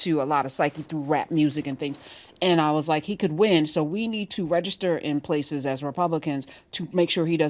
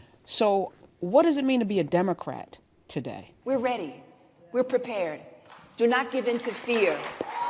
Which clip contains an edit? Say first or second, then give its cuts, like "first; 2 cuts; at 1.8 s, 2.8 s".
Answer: second; 1 cut; at 3.3 s